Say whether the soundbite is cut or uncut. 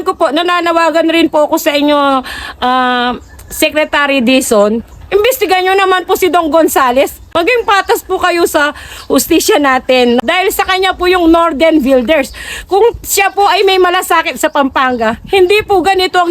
cut